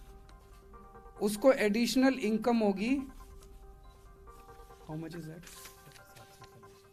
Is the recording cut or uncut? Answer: uncut